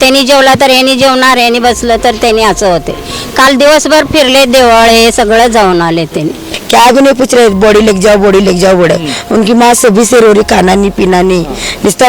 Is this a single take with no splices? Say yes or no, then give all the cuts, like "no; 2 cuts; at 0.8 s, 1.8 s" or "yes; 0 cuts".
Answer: no; 1 cut; at 6.5 s